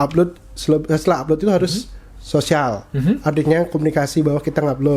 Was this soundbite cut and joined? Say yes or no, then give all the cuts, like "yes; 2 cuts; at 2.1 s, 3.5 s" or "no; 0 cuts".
no; 0 cuts